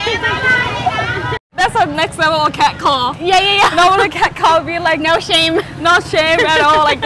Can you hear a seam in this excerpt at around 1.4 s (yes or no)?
yes